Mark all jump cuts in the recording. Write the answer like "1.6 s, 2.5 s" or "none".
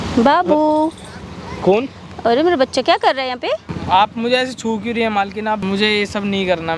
3.7 s, 5.6 s